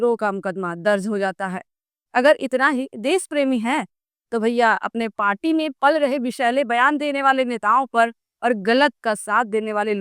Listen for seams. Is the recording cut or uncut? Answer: uncut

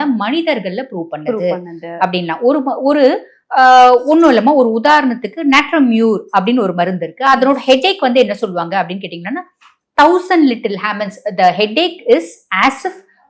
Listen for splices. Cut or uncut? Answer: uncut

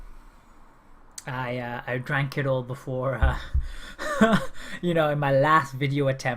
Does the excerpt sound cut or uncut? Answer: cut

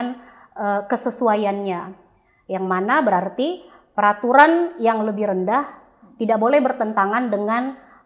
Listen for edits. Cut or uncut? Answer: uncut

